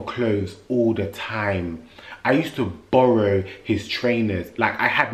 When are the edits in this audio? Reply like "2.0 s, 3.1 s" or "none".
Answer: none